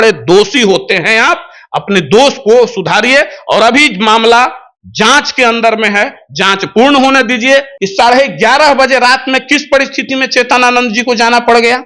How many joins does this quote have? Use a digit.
1